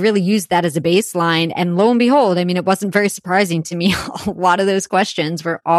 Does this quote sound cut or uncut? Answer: uncut